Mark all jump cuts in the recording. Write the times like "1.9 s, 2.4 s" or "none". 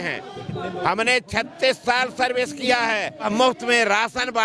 3.3 s